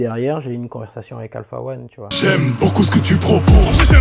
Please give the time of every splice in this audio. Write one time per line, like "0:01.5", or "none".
0:02.1